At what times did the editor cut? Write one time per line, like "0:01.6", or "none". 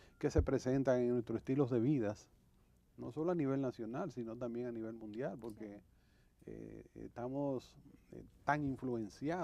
none